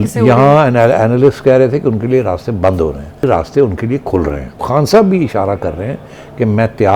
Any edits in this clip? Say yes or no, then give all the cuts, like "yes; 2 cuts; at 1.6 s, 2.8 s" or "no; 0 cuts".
yes; 1 cut; at 4.6 s